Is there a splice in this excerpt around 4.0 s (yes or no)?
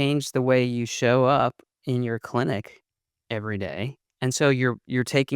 yes